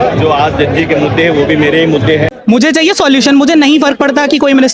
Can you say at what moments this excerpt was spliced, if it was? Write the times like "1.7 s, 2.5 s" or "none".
2.3 s